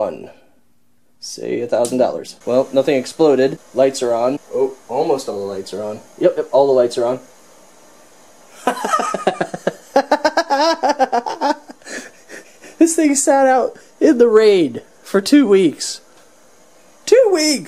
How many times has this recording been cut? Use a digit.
3